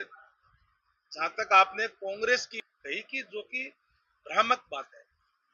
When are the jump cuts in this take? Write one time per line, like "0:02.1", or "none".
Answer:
0:02.5